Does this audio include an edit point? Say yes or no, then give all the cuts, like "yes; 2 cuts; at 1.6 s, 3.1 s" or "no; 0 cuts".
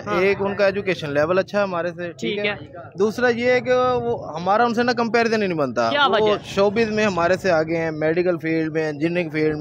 no; 0 cuts